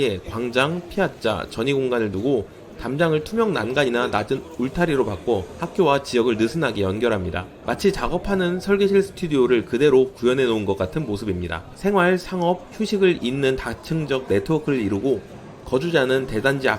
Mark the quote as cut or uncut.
cut